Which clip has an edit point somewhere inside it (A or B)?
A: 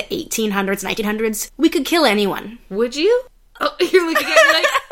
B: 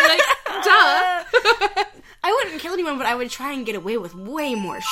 A